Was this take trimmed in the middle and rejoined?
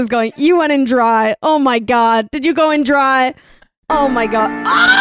no; 0 cuts

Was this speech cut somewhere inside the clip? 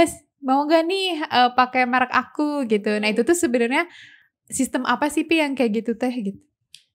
no; 0 cuts

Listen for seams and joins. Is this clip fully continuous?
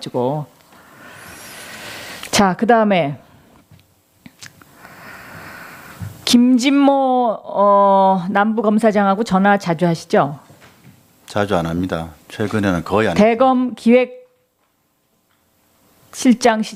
yes; 0 cuts

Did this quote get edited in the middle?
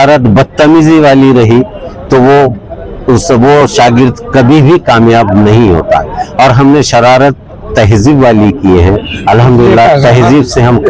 no; 0 cuts

